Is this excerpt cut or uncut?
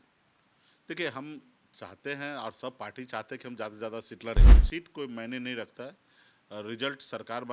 cut